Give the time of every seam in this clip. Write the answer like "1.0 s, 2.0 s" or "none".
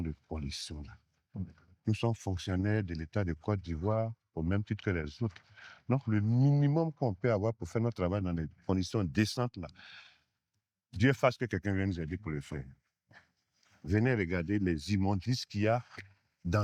none